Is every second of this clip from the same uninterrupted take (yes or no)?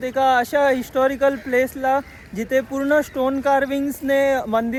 yes